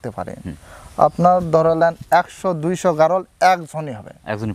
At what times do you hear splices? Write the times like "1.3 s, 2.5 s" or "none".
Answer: none